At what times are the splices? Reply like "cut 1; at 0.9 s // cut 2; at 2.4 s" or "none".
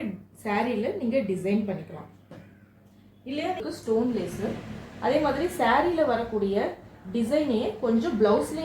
cut 1; at 3.6 s